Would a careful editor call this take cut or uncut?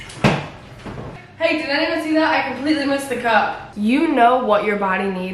cut